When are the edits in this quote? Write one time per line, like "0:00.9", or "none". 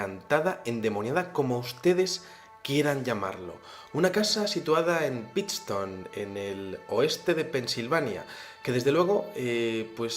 0:05.1